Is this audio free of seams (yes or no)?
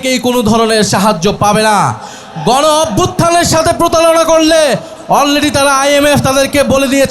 no